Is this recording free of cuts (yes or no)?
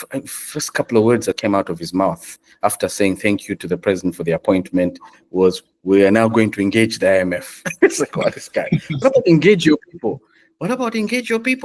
yes